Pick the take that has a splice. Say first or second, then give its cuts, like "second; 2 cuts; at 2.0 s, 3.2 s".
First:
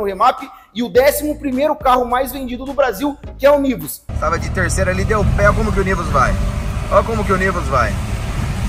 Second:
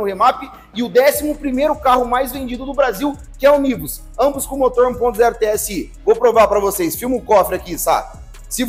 first; 1 cut; at 4.0 s